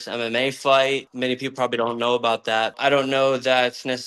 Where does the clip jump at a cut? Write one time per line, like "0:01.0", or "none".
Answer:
0:01.1
0:02.8